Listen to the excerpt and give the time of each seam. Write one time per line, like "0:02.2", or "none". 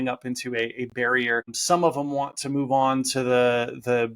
0:01.5